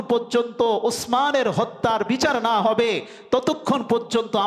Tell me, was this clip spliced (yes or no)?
no